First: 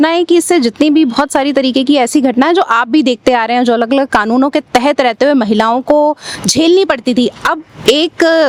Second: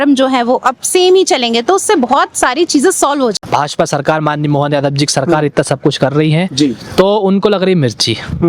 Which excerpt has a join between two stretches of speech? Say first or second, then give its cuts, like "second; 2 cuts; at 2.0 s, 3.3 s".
second; 1 cut; at 3.4 s